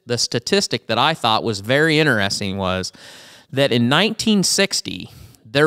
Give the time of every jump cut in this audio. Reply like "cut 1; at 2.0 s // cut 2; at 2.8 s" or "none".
none